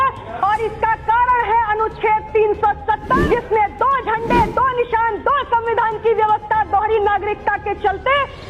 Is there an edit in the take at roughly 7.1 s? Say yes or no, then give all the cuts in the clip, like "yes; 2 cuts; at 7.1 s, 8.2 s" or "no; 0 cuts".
no; 1 cut; at 3.2 s